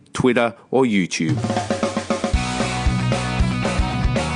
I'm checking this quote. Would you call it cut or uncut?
cut